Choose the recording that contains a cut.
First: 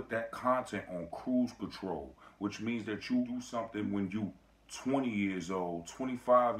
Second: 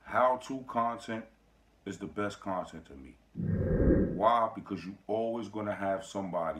second; 2 cuts; at 3.0 s, 4.2 s

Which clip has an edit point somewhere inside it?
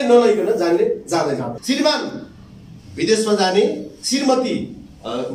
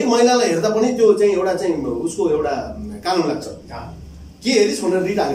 first; 1 cut; at 1.6 s

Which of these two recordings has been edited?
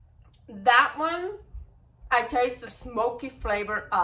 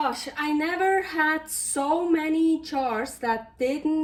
first; 1 cut; at 2.7 s

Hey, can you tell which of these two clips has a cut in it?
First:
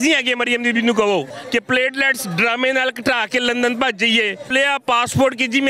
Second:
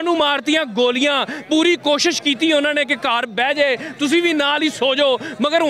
first; 2 cuts; at 1.4 s, 4.5 s

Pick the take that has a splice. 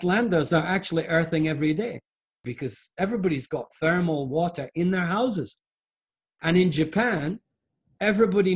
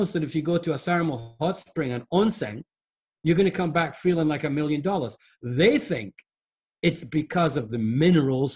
first; 2 cuts; at 2.3 s, 6.3 s

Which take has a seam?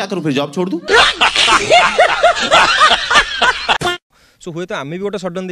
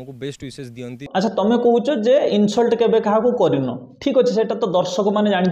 first; 1 cut; at 4.0 s

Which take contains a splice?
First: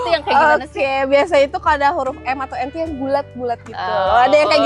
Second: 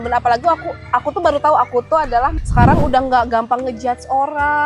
second; 1 cut; at 2.4 s

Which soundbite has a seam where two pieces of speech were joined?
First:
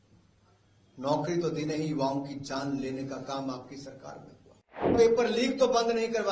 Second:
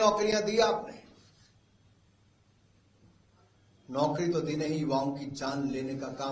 first; 1 cut; at 4.9 s

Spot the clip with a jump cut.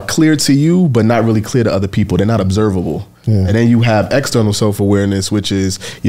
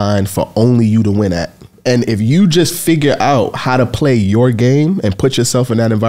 second; 1 cut; at 1.7 s

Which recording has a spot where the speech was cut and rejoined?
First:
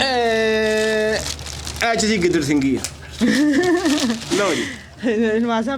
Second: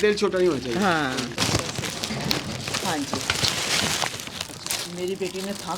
second; 1 cut; at 1.3 s

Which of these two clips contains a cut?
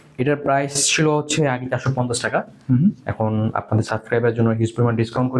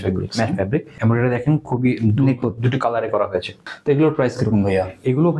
second; 2 cuts; at 0.9 s, 3.6 s

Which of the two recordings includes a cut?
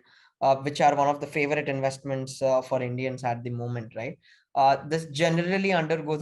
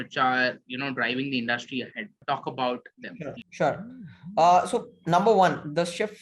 second; 2 cuts; at 2.2 s, 3.4 s

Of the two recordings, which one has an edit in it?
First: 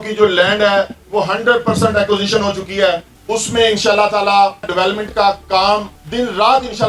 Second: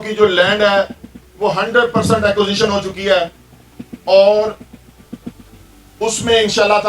first; 4 cuts; at 1.0 s, 3.1 s, 4.7 s, 6.0 s

